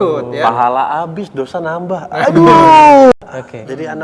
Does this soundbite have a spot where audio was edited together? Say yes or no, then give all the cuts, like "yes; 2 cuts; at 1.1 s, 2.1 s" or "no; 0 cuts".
yes; 1 cut; at 3.1 s